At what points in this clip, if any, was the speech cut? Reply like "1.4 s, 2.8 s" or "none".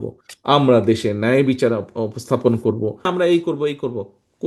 3.1 s